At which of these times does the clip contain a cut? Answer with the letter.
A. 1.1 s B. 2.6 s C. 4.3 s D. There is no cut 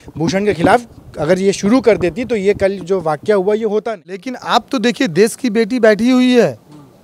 C